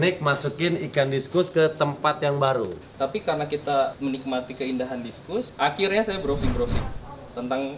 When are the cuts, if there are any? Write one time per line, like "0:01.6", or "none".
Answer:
0:02.8
0:04.0
0:05.5

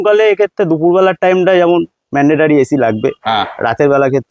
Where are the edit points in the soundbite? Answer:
none

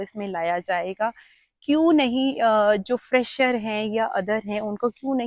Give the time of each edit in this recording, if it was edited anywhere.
none

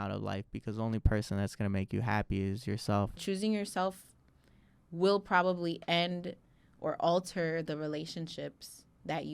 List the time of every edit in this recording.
0:03.2

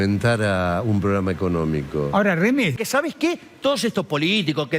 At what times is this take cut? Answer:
0:02.7

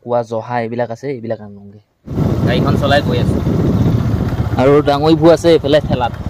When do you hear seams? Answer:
0:02.1

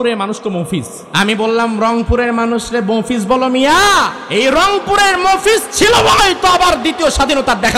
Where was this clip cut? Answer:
0:01.0
0:04.2

